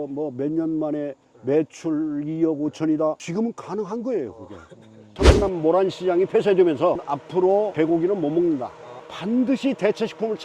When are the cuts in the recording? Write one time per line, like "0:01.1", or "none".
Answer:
0:05.1
0:09.0